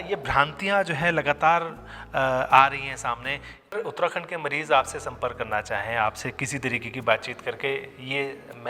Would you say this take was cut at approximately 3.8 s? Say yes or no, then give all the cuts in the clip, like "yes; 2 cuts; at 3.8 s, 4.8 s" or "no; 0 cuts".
yes; 1 cut; at 3.8 s